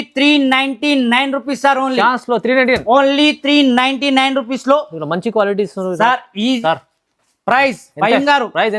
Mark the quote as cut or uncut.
cut